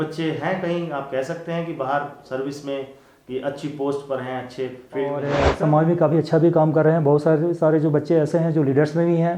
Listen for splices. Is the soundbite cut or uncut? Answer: cut